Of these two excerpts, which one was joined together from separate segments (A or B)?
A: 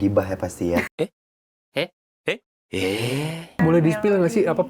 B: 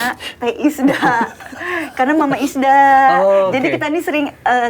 A